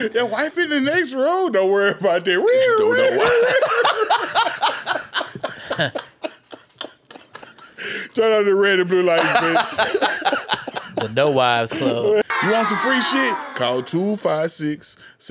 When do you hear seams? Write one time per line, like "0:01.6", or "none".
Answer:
0:12.3